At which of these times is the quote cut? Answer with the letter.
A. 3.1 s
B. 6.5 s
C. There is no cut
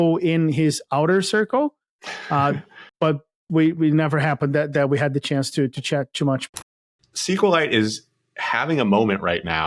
B